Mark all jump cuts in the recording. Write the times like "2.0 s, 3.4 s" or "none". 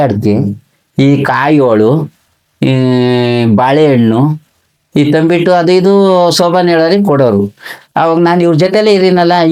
none